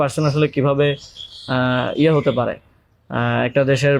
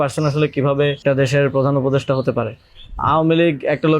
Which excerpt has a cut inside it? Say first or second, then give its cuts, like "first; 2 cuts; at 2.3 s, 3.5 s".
second; 2 cuts; at 1.0 s, 2.9 s